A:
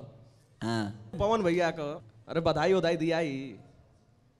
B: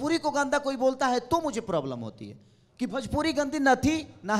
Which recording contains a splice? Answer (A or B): A